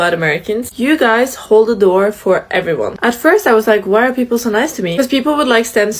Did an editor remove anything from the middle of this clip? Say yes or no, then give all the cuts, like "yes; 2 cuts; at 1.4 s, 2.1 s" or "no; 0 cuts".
no; 0 cuts